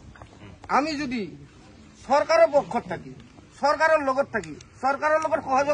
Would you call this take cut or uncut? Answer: uncut